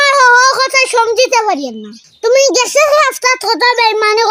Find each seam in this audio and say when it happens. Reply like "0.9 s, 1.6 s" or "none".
none